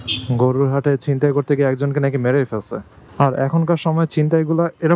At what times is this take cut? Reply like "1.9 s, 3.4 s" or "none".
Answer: 3.0 s

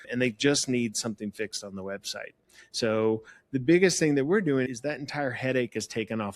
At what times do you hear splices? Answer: none

